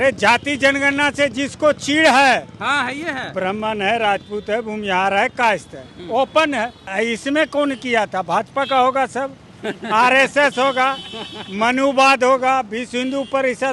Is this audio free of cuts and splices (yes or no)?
no